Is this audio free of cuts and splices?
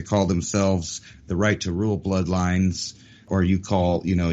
no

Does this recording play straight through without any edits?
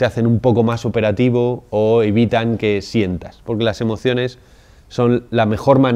yes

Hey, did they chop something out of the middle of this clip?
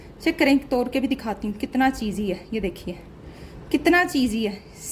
no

